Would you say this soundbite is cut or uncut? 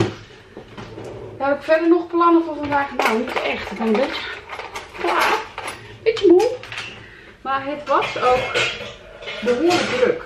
uncut